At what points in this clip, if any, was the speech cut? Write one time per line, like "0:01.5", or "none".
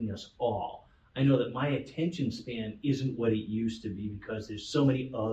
none